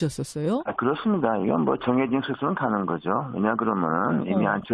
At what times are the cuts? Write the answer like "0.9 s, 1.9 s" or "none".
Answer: none